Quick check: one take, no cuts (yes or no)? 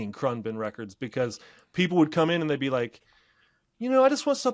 yes